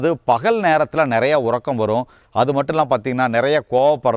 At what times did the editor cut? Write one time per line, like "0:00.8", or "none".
0:02.2